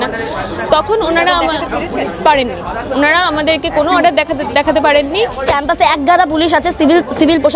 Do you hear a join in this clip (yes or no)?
yes